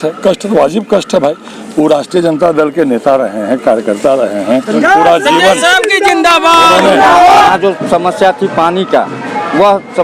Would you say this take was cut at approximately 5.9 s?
no; 1 cut; at 7.5 s

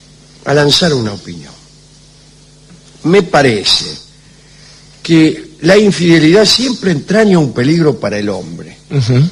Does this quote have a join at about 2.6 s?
yes; 1 cut; at 2.6 s

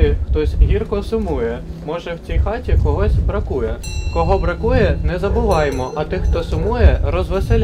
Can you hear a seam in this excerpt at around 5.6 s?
no; 0 cuts

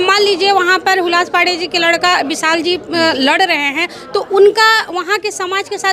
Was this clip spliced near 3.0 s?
no; 0 cuts

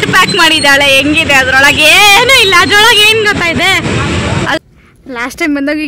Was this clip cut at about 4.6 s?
yes; 1 cut; at 4.6 s

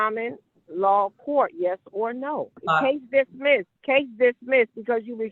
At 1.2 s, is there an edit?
no; 2 cuts; at 2.6 s, 3.7 s

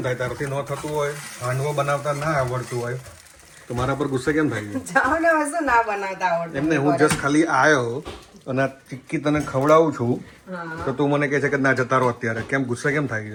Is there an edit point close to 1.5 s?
no; 0 cuts

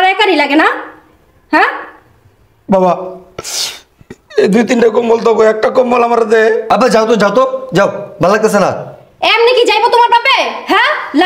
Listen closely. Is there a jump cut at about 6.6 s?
yes; 1 cut; at 6.6 s

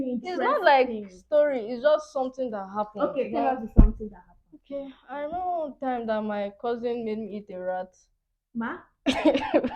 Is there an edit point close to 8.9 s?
yes; 1 cut; at 8.9 s

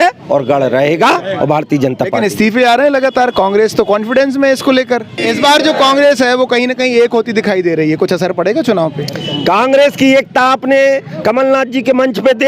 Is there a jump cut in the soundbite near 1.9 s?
no; 1 cut; at 5.2 s

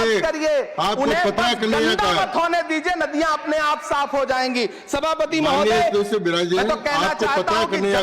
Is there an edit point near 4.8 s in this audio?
no; 0 cuts

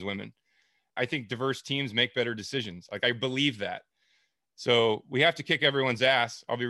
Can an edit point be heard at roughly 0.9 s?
yes; 1 cut; at 0.9 s

